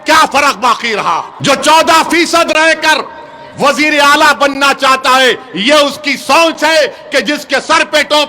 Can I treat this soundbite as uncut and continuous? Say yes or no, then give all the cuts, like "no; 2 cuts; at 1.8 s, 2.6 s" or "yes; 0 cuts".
no; 1 cut; at 1.3 s